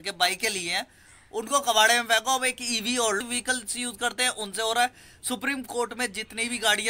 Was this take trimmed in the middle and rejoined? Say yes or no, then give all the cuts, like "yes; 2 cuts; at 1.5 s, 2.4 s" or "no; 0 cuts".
yes; 1 cut; at 3.2 s